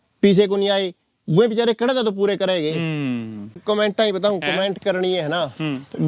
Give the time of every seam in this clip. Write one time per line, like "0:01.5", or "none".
0:03.6